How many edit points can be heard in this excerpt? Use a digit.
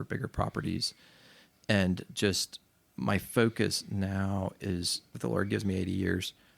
1